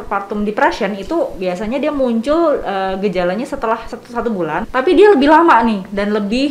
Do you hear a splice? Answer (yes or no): yes